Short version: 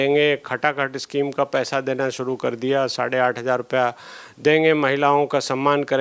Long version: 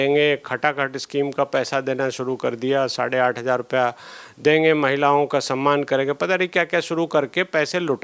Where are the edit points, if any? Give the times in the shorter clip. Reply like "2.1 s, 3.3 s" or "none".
none